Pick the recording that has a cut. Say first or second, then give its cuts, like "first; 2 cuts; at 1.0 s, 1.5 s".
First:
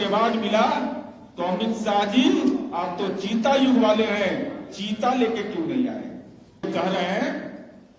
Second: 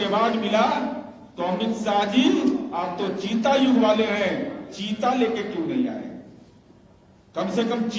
first; 1 cut; at 6.6 s